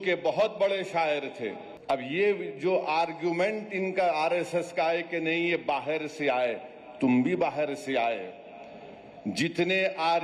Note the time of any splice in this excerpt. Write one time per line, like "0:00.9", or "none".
0:01.7

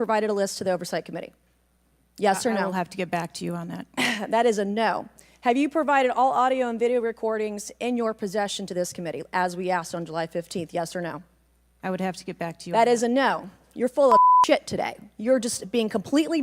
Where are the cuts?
none

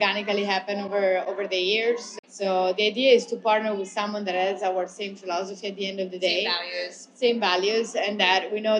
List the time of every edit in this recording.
0:02.1

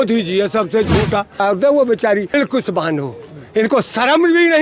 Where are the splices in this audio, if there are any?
0:01.4
0:02.3

